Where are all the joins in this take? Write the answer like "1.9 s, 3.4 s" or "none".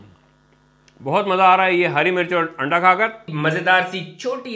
3.3 s

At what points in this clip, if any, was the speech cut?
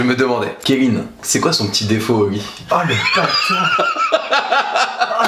none

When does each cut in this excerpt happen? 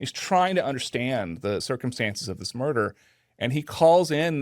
1.6 s

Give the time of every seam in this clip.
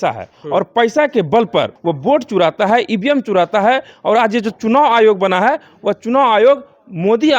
1.8 s

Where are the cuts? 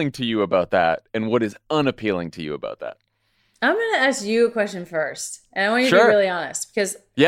none

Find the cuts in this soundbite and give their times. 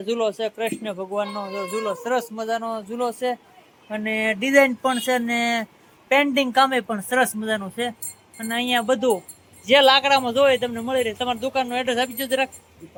none

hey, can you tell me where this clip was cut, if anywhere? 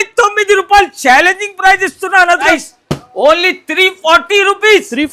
2.5 s

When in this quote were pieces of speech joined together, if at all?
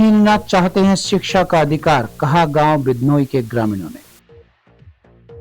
4.1 s

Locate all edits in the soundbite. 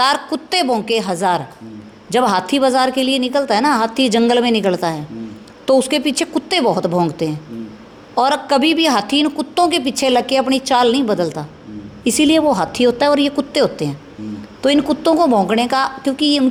none

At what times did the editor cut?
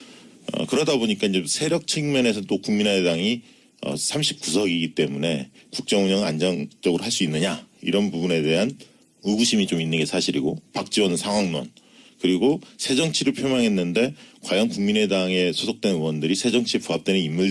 12.7 s

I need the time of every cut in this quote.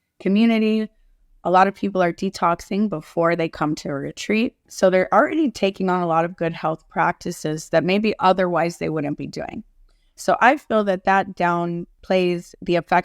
4.7 s, 11.9 s

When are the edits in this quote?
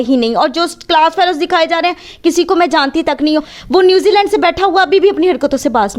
3.5 s

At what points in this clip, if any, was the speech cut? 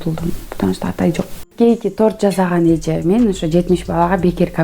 1.5 s

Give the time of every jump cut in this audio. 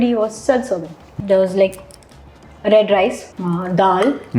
1.1 s, 3.3 s

